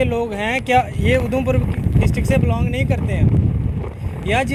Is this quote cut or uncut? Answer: uncut